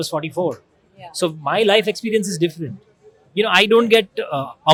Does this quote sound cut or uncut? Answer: uncut